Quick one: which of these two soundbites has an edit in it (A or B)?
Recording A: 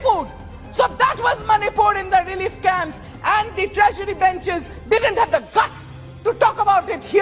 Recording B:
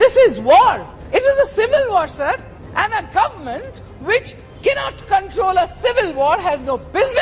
B